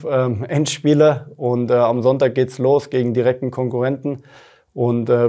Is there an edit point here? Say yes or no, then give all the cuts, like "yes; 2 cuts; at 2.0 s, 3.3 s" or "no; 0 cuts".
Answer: no; 0 cuts